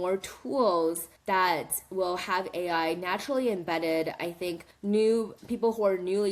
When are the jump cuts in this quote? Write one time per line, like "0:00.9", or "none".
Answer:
0:01.1
0:04.7